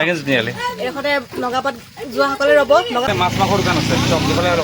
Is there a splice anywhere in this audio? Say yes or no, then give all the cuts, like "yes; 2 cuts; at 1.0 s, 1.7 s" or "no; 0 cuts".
yes; 1 cut; at 3.1 s